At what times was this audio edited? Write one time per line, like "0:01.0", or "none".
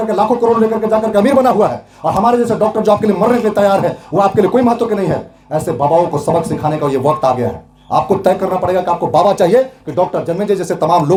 none